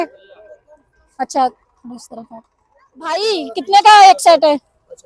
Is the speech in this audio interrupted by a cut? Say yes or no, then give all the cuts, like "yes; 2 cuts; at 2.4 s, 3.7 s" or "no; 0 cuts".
yes; 1 cut; at 3.2 s